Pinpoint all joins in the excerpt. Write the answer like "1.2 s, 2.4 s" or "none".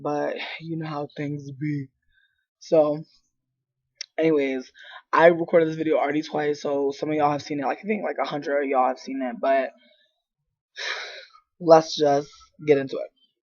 7.0 s

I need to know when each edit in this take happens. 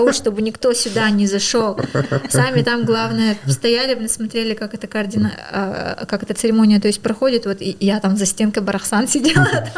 none

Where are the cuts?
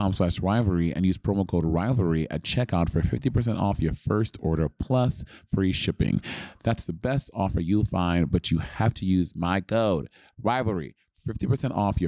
none

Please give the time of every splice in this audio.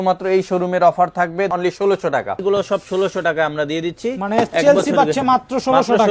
1.5 s, 2.4 s

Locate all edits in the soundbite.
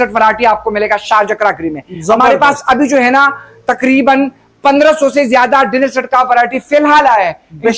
none

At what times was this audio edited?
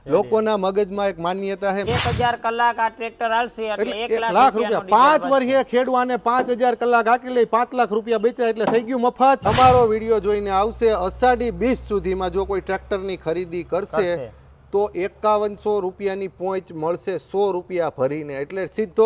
1.8 s, 9.5 s

